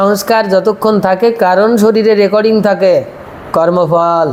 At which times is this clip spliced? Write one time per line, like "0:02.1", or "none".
none